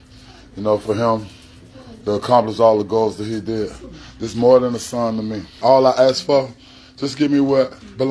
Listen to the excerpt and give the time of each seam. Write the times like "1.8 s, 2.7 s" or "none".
5.5 s